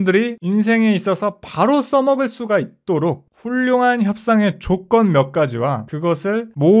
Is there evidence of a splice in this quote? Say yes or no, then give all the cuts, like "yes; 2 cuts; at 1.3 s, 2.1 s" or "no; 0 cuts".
no; 0 cuts